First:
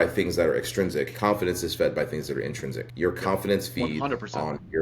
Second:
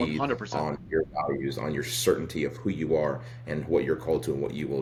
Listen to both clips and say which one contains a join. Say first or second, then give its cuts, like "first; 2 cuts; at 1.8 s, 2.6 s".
first; 2 cuts; at 1.1 s, 2.8 s